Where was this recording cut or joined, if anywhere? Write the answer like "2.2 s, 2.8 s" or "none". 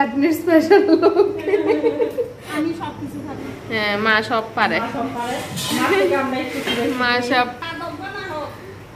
2.5 s